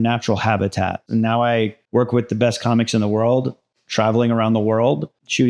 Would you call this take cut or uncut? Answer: cut